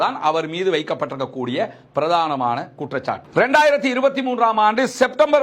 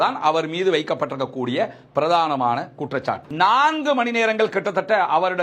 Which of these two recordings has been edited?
second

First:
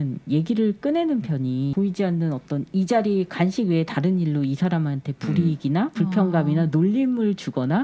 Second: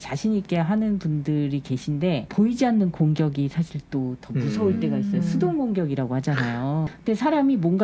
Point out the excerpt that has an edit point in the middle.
second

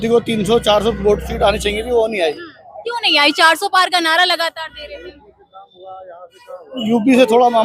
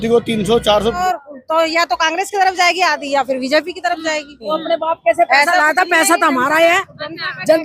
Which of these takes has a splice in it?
second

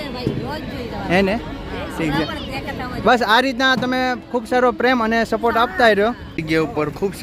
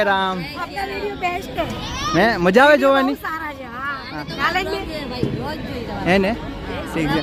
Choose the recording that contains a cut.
first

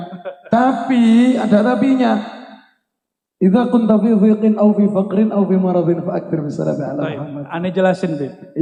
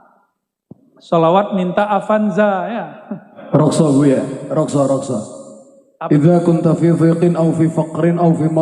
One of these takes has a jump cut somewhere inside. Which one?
second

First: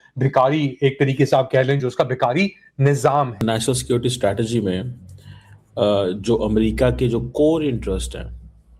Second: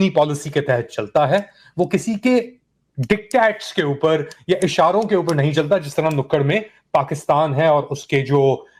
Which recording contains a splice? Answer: first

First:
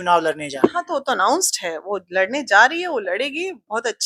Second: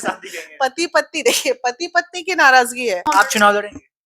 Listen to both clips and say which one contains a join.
second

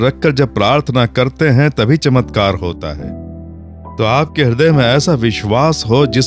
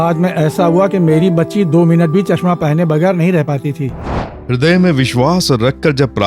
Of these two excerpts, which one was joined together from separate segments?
second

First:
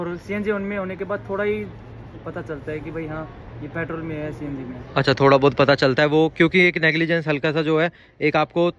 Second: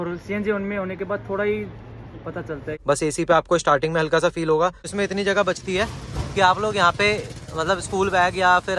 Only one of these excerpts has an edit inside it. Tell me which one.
second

